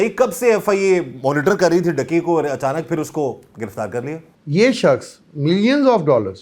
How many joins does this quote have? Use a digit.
1